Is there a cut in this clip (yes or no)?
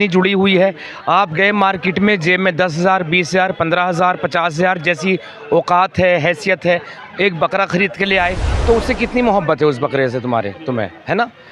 yes